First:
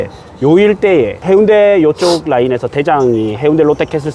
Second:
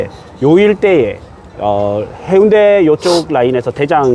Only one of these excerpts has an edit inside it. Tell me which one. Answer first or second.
first